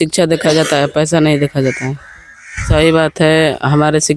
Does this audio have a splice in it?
yes; 1 cut; at 2.7 s

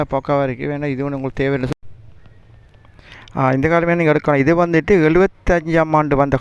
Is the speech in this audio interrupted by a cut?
yes; 1 cut; at 1.7 s

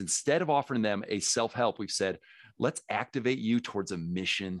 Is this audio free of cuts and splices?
yes; 0 cuts

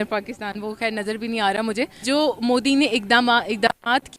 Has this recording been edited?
yes; 1 cut; at 2.0 s

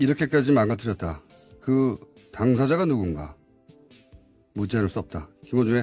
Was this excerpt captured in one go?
no; 1 cut; at 3.3 s

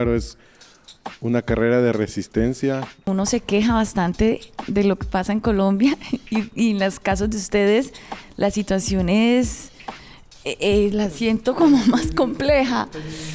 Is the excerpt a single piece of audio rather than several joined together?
no; 1 cut; at 3.1 s

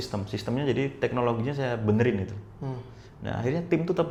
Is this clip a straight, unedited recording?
yes; 0 cuts

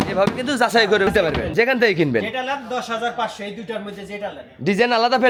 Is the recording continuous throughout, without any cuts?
yes; 0 cuts

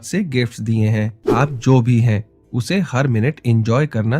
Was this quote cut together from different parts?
yes; 1 cut; at 1.2 s

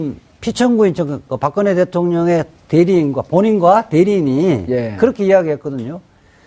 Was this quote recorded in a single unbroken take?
no; 1 cut; at 2.6 s

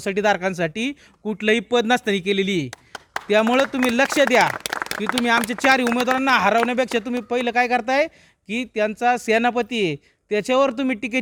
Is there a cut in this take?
no; 0 cuts

